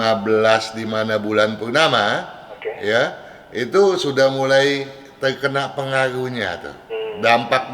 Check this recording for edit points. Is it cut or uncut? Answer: uncut